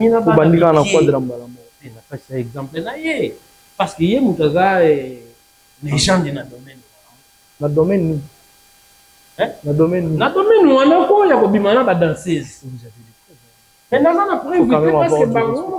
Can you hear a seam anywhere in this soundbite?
no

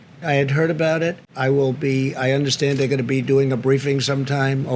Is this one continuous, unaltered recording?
yes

